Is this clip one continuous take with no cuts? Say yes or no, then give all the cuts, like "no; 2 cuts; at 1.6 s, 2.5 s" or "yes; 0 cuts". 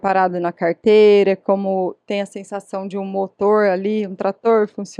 yes; 0 cuts